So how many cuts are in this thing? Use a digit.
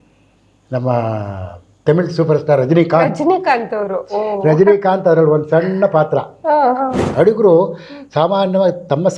2